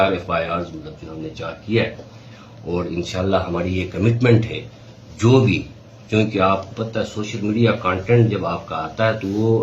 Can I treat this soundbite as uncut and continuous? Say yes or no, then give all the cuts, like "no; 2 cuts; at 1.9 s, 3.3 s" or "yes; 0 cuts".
yes; 0 cuts